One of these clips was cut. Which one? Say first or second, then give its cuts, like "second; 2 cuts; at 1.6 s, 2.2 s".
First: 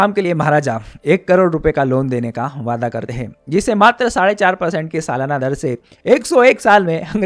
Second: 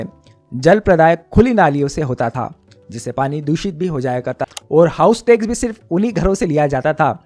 second; 1 cut; at 4.4 s